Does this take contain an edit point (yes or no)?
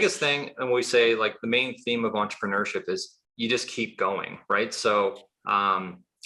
no